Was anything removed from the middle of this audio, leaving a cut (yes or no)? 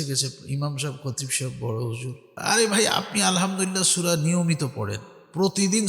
yes